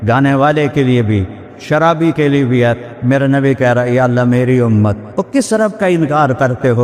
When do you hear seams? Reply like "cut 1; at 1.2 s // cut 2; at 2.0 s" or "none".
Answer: cut 1; at 5.1 s